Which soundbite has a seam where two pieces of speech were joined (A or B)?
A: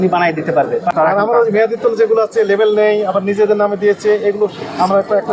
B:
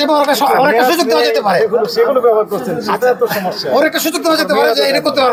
A